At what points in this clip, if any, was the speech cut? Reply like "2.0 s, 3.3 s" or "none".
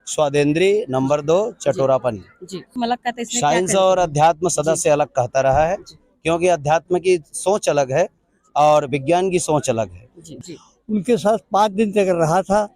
2.7 s, 10.3 s